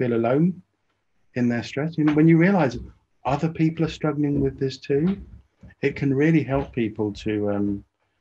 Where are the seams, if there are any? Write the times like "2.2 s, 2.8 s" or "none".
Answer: none